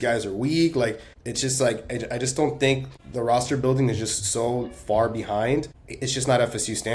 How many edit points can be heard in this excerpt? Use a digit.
0